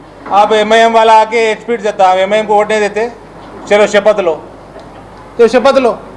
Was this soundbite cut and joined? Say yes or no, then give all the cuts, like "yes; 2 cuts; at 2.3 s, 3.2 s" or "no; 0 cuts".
no; 0 cuts